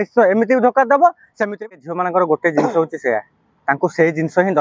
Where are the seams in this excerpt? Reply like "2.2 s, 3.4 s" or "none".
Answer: 1.5 s